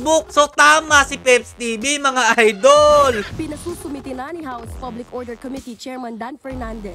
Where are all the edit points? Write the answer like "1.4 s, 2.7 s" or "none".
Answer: 3.3 s